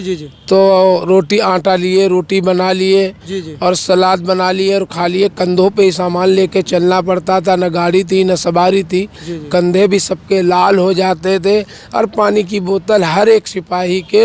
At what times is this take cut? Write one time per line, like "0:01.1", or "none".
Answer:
none

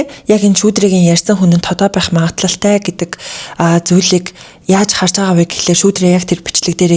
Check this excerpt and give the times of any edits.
none

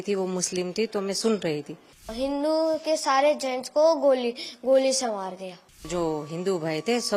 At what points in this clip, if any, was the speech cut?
0:02.1
0:05.9

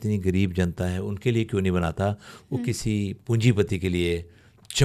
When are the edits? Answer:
0:03.2

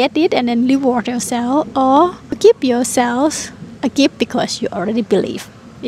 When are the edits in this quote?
0:02.4

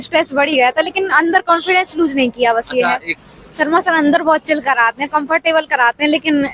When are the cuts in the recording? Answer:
0:03.2

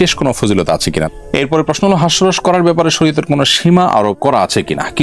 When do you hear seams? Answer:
0:01.1

